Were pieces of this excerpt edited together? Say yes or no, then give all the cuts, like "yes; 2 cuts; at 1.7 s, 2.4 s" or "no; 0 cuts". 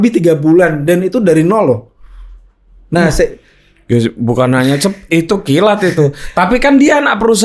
no; 0 cuts